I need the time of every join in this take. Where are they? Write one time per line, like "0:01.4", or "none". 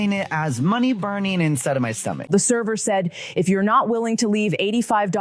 0:02.3